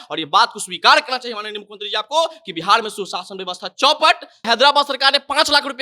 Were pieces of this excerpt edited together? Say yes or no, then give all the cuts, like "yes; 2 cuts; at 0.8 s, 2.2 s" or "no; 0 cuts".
yes; 1 cut; at 4.4 s